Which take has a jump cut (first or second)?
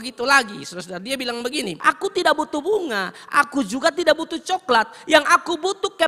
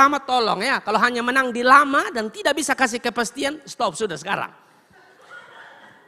first